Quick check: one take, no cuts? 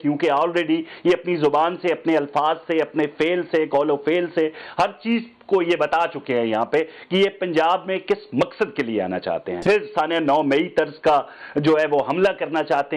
no; 1 cut; at 9.5 s

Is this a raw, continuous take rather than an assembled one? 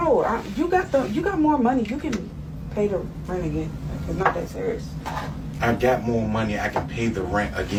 yes; 0 cuts

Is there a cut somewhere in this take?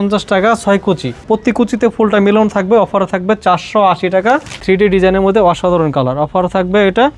yes; 2 cuts; at 1.2 s, 4.5 s

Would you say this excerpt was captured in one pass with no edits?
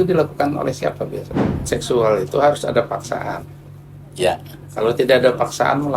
no; 1 cut; at 1.7 s

